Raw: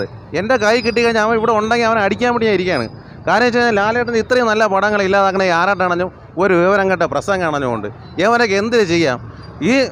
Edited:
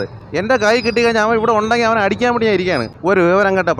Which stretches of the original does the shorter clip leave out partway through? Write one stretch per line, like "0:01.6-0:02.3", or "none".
0:02.9-0:06.2